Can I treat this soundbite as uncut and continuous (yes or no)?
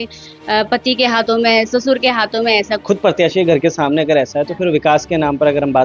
no